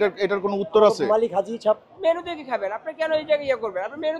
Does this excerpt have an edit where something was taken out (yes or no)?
yes